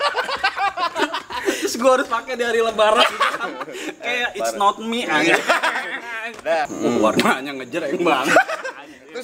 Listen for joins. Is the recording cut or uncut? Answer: cut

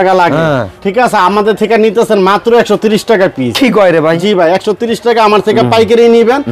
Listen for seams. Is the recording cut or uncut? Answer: uncut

